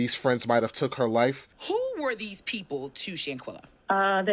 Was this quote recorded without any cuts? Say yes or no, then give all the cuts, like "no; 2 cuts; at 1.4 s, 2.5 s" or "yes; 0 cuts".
no; 1 cut; at 1.5 s